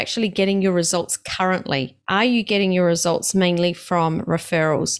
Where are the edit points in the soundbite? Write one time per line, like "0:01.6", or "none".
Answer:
0:02.0